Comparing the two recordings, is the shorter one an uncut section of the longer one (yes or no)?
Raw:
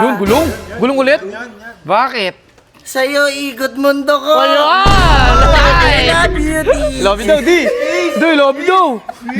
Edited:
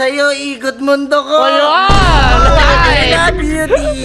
yes